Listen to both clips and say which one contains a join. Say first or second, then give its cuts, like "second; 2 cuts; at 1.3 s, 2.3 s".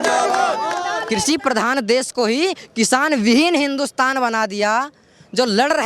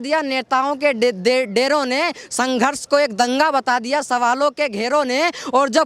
first; 1 cut; at 1.0 s